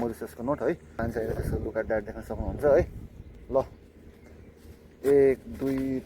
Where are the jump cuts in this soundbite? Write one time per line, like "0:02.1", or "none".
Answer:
0:01.0